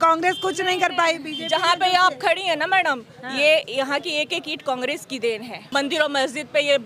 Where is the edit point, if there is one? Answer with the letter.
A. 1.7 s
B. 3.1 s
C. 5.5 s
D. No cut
C